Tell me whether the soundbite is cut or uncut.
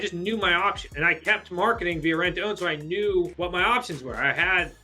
cut